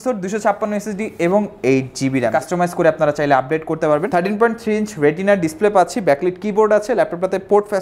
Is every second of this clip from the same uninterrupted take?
no; 2 cuts; at 2.3 s, 4.1 s

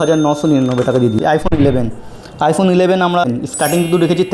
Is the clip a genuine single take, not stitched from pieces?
no; 2 cuts; at 1.2 s, 3.2 s

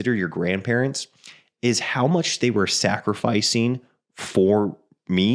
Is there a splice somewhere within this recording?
no; 0 cuts

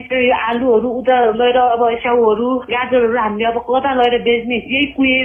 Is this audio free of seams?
yes; 0 cuts

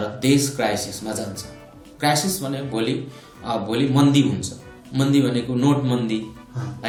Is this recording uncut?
yes; 0 cuts

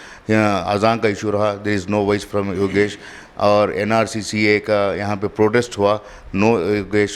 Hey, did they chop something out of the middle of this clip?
no; 0 cuts

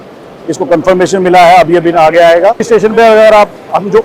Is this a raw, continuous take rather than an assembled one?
no; 1 cut; at 2.6 s

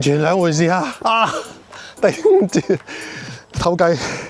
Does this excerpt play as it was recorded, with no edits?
no; 1 cut; at 0.9 s

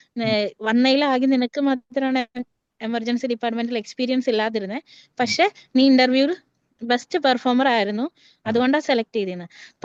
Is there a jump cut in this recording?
no; 0 cuts

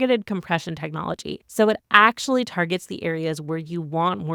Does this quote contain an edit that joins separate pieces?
no; 0 cuts

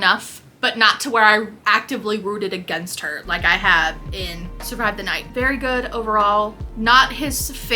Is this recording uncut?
yes; 0 cuts

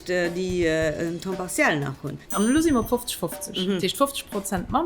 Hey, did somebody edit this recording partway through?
yes; 1 cut; at 2.2 s

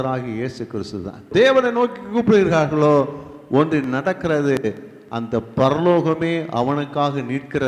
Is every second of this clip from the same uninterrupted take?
no; 1 cut; at 1.3 s

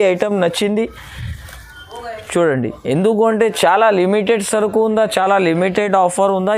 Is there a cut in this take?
no; 0 cuts

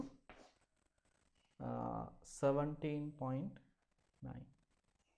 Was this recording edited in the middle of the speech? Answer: no; 0 cuts

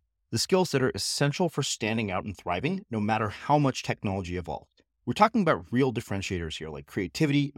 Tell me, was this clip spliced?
no; 0 cuts

